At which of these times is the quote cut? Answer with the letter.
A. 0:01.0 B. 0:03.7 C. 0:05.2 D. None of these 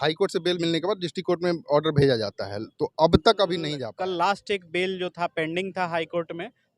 B